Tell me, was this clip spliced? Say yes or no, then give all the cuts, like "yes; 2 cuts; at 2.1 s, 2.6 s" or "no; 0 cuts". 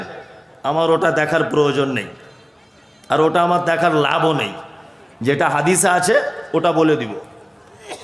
no; 0 cuts